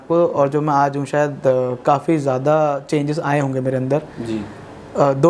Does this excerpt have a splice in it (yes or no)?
no